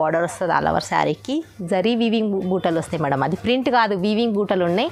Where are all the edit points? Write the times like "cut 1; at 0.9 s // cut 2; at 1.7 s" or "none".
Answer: none